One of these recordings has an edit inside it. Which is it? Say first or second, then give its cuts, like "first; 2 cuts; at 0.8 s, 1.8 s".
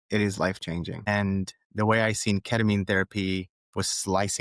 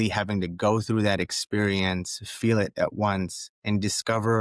first; 1 cut; at 0.9 s